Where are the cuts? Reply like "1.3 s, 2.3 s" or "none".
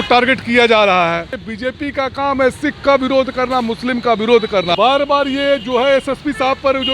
1.4 s, 4.7 s